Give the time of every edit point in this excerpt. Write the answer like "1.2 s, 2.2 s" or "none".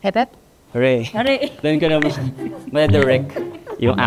none